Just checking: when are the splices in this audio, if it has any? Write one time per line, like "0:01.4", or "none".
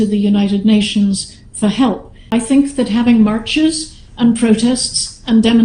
0:02.1